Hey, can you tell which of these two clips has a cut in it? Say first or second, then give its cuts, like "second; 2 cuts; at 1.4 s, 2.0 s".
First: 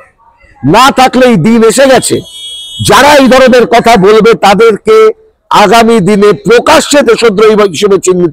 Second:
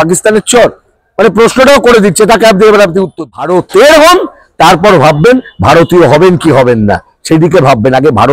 second; 1 cut; at 3.4 s